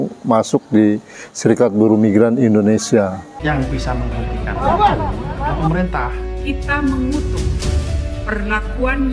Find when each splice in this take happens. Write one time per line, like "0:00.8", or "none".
0:03.3